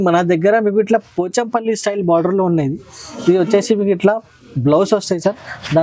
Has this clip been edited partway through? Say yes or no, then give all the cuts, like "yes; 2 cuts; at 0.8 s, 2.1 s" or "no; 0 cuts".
no; 0 cuts